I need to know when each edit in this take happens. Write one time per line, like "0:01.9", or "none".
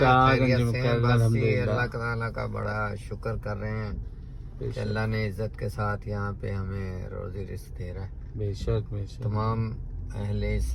none